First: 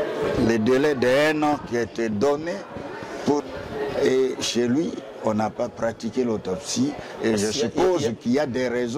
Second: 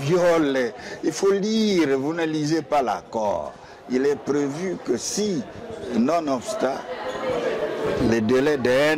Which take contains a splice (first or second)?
first